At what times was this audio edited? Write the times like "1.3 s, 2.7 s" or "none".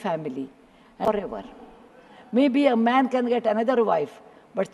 1.0 s

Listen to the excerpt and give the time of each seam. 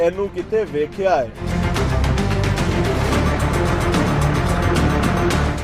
none

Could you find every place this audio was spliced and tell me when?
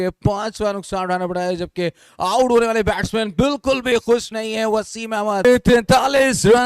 5.4 s

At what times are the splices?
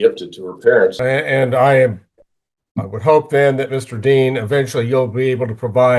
1.0 s

